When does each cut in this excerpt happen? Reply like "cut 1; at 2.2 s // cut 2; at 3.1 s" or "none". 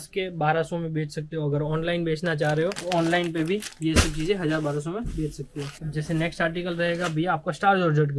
none